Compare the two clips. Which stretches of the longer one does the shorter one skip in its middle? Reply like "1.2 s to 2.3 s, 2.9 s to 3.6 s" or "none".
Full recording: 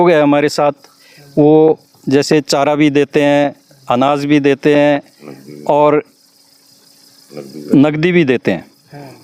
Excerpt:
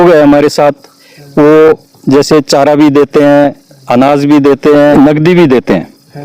4.9 s to 7.7 s